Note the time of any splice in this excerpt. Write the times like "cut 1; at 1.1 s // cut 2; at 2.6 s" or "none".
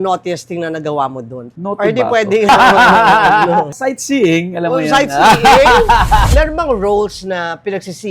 cut 1; at 1.4 s // cut 2; at 2.5 s // cut 3; at 6.3 s